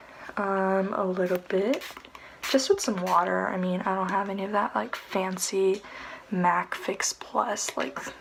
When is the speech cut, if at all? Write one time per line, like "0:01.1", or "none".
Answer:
none